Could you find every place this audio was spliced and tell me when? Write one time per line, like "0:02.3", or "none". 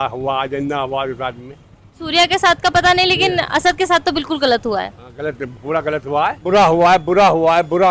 0:01.9
0:06.4

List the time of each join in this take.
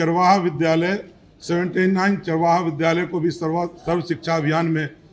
none

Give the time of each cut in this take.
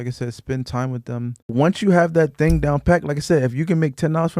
0:01.5

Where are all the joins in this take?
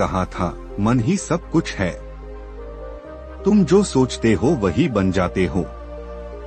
0:02.0
0:03.4

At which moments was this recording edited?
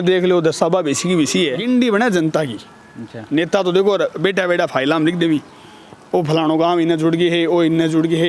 0:01.6

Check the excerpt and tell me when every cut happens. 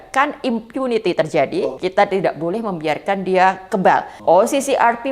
0:01.6
0:04.1

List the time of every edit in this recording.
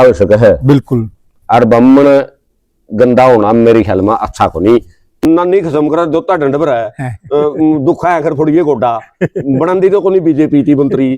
0:05.2

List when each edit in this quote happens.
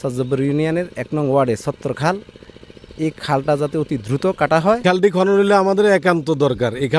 0:04.8

